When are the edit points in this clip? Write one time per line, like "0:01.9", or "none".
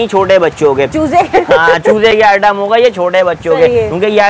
none